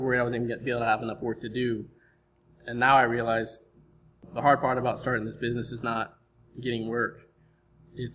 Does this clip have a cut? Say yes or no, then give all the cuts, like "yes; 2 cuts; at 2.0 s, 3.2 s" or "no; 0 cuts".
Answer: yes; 1 cut; at 4.2 s